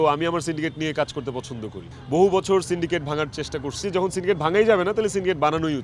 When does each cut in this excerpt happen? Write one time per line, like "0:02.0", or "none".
0:01.9
0:03.8

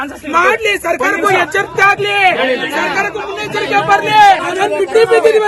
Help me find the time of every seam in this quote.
0:04.5

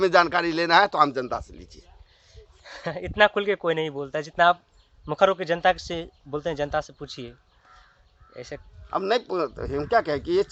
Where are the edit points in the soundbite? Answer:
none

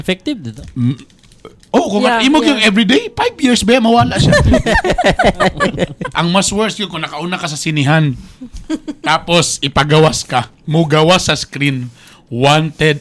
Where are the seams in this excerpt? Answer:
0:06.1

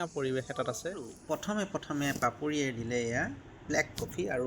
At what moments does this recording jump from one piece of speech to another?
0:01.1

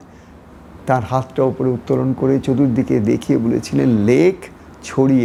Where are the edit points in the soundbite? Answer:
none

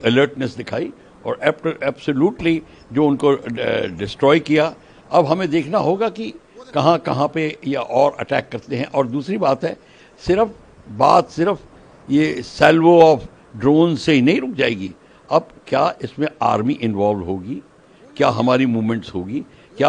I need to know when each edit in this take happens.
none

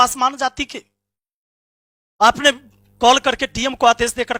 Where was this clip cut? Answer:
none

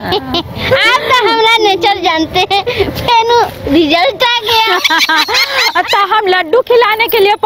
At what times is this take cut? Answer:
none

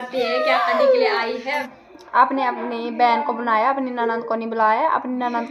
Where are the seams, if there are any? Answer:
0:01.7

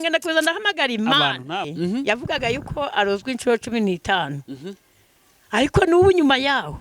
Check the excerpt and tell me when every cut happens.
0:01.7

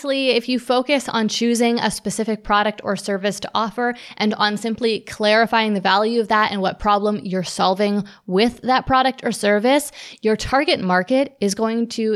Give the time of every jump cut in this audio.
none

